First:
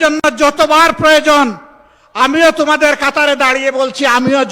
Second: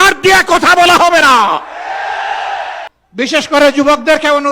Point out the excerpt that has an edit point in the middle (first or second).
second